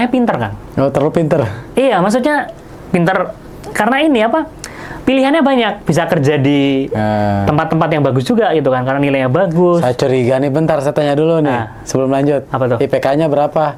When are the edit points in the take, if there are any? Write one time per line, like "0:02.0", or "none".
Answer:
none